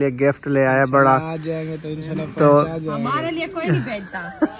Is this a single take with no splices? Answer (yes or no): yes